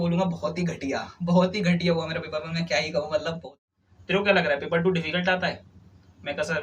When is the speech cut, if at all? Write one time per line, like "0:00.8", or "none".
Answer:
0:03.5